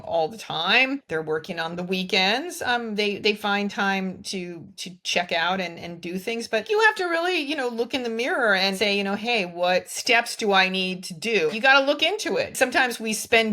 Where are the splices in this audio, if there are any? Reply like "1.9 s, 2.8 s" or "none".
1.0 s, 6.6 s, 8.8 s, 9.9 s, 11.5 s, 12.5 s